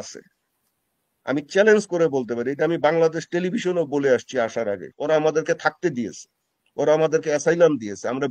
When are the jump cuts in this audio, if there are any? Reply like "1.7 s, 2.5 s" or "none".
4.9 s